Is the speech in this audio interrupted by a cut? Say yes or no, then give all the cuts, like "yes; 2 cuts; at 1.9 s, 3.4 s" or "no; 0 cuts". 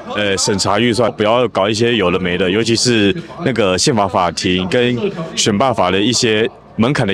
yes; 1 cut; at 1.1 s